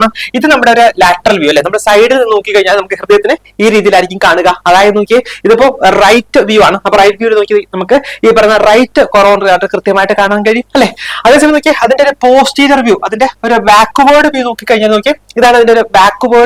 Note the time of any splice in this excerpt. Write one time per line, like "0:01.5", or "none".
none